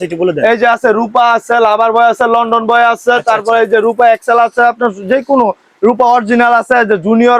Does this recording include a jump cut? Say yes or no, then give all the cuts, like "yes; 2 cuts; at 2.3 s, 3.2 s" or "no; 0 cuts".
no; 0 cuts